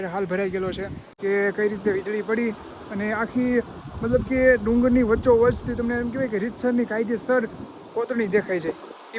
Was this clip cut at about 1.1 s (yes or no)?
yes